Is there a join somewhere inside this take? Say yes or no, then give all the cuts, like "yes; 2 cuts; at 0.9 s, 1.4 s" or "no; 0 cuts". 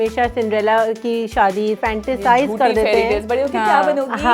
yes; 1 cut; at 1.8 s